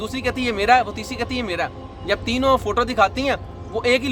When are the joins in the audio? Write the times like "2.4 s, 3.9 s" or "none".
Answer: none